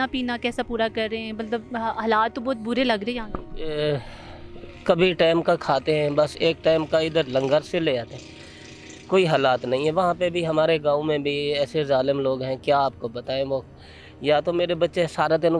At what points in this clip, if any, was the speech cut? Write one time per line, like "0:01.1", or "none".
none

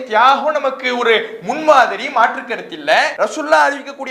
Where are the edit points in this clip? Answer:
0:03.1

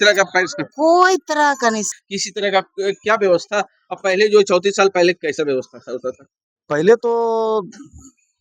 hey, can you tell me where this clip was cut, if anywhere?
0:01.9

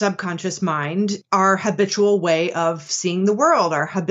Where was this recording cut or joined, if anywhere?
0:01.2

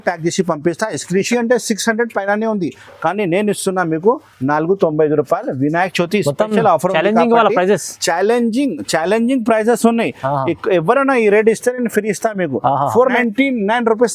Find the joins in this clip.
0:01.3
0:13.2

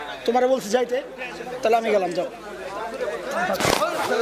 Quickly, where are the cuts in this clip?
none

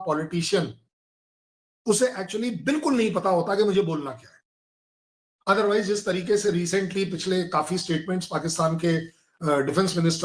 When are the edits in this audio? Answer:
none

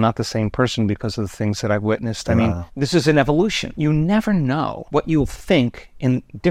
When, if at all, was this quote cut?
0:02.7
0:03.7
0:04.8

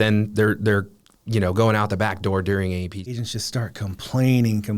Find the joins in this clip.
0:03.2

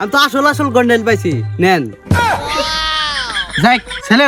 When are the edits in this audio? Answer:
none

